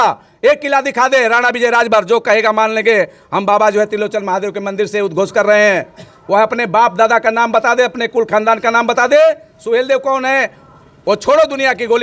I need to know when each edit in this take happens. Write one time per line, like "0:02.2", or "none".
none